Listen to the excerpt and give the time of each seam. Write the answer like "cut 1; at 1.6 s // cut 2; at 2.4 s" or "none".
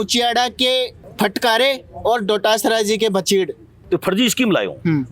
cut 1; at 1.0 s // cut 2; at 3.8 s